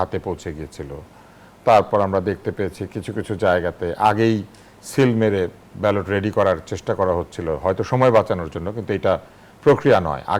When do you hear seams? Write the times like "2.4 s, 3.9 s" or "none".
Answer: none